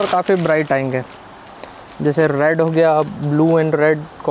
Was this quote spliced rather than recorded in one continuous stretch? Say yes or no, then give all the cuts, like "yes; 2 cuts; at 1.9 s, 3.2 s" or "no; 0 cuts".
no; 0 cuts